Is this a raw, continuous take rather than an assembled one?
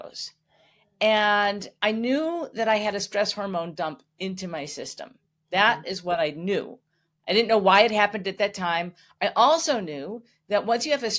yes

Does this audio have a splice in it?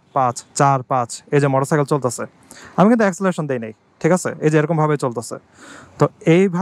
no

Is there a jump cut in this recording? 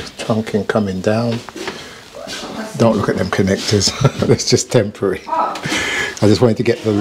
no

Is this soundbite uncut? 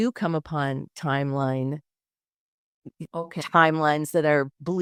yes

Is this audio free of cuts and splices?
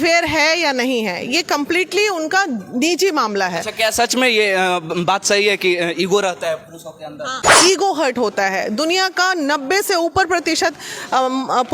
no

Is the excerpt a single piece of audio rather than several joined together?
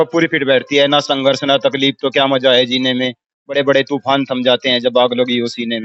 yes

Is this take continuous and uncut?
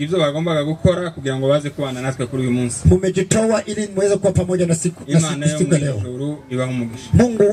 yes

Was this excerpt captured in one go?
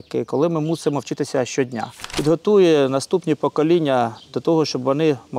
no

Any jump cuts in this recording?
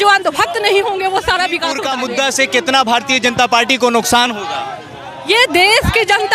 yes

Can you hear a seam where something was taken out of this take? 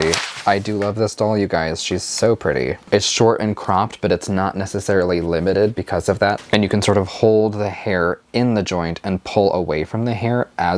yes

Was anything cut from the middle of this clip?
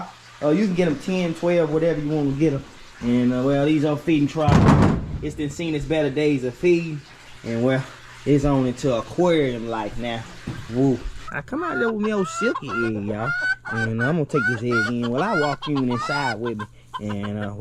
yes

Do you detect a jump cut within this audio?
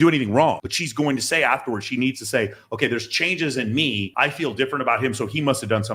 no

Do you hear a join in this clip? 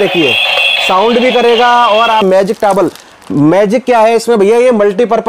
yes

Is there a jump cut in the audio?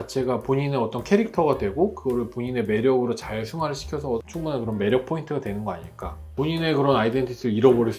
yes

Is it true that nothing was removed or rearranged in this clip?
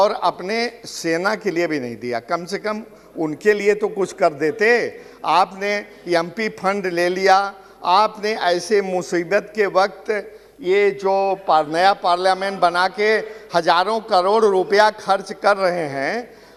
yes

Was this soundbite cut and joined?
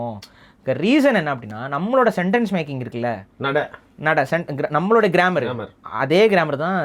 no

